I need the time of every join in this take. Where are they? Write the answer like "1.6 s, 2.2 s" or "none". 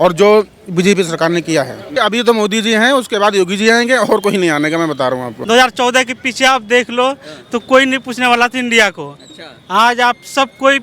1.8 s, 5.3 s